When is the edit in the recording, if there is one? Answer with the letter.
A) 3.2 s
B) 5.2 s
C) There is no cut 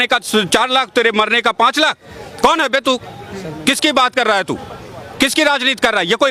C